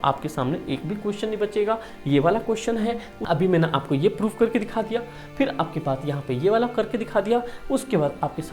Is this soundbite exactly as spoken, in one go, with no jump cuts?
no; 1 cut; at 3.1 s

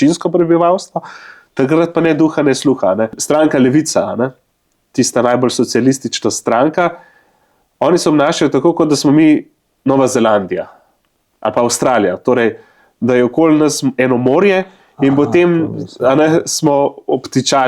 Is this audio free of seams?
no; 1 cut; at 3.2 s

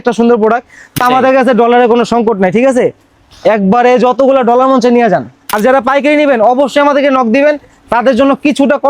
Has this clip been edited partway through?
yes; 2 cuts; at 1.0 s, 5.4 s

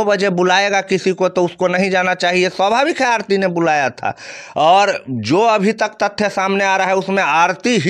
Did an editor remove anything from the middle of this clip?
no; 0 cuts

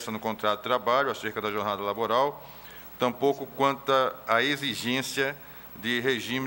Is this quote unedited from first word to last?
yes; 0 cuts

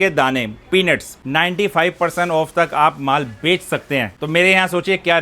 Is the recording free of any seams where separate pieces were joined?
no; 2 cuts; at 1.2 s, 4.1 s

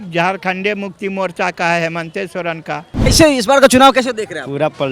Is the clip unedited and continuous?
no; 1 cut; at 2.9 s

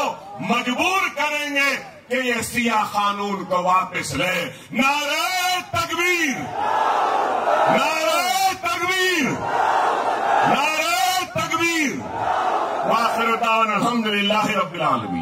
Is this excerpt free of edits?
yes; 0 cuts

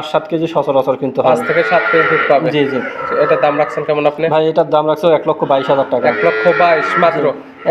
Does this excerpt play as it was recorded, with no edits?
yes; 0 cuts

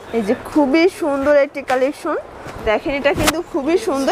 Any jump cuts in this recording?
yes; 1 cut; at 2.7 s

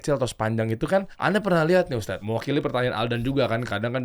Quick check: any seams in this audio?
yes; 2 cuts; at 1.1 s, 2.2 s

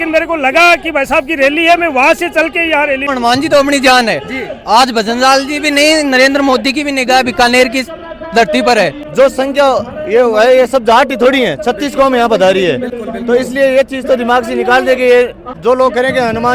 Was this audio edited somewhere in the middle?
yes; 3 cuts; at 3.1 s, 9.0 s, 15.4 s

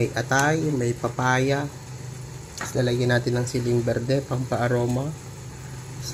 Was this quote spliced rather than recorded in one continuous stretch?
no; 0 cuts

